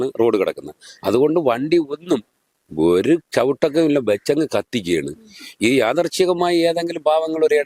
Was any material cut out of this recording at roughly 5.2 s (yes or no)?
no